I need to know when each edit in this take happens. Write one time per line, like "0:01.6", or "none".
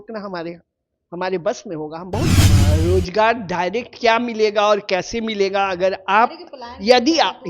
0:02.4